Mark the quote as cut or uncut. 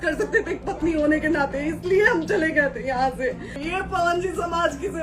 cut